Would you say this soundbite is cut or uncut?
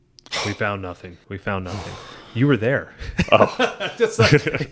cut